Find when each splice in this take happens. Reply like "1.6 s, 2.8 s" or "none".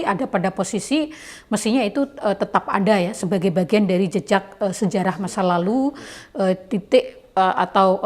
none